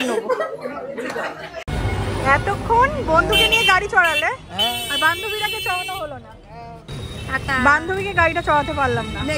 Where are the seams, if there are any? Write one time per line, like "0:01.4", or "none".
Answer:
0:01.5

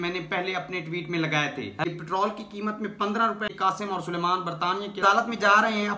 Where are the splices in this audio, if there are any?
0:01.9
0:03.5

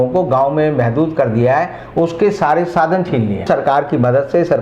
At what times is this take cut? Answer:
0:03.4

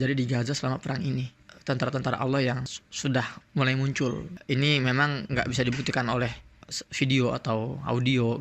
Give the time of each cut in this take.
0:03.4
0:04.3

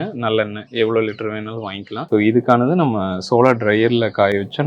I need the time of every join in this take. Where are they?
0:01.9

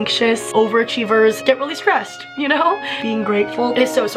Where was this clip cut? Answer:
none

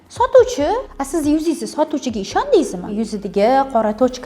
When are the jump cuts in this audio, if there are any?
0:00.9
0:02.9

